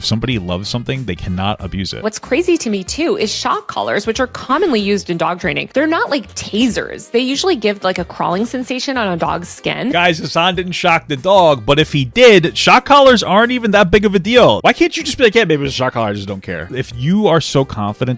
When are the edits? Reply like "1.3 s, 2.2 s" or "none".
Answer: 2.0 s, 9.9 s, 14.6 s, 16.8 s